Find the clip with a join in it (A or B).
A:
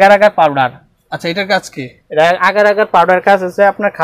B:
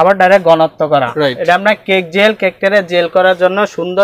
B